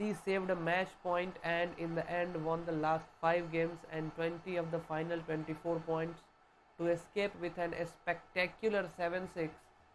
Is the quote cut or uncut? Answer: uncut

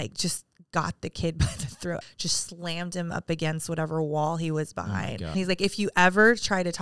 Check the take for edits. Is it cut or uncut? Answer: cut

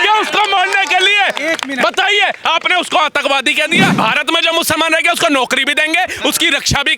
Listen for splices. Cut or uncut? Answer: cut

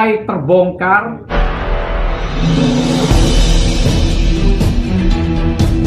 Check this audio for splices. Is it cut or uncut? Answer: cut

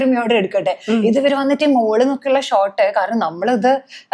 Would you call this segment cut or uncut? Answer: uncut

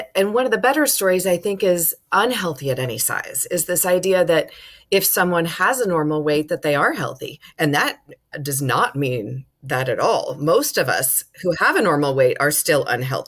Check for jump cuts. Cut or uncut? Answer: cut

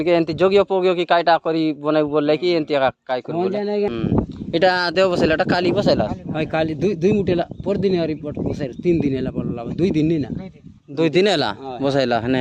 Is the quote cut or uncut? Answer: cut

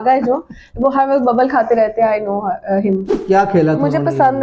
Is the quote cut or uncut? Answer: cut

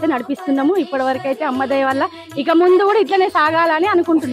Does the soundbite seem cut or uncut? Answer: uncut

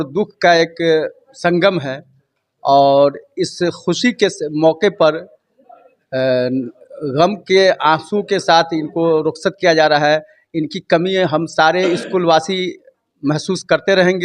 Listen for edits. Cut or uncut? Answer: uncut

